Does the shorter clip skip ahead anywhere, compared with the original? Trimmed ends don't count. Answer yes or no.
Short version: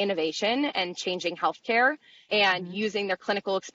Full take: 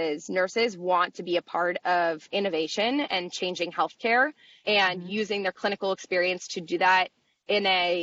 no